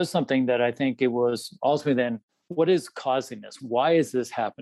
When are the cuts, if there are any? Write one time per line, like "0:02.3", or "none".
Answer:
0:02.2
0:03.6